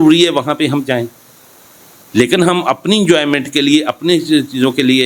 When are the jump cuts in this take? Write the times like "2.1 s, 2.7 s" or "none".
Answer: none